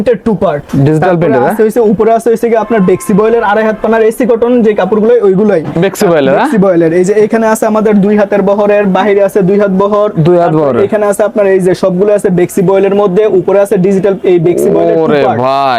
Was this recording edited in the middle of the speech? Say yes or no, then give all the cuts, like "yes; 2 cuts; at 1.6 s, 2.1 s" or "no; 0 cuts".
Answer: no; 0 cuts